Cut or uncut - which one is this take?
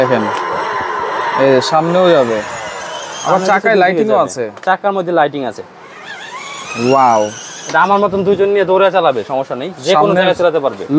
uncut